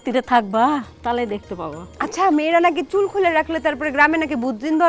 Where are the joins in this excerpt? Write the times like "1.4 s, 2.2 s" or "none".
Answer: 0.9 s, 1.8 s